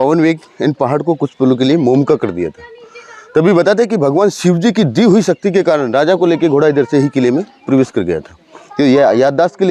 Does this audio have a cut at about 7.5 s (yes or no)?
no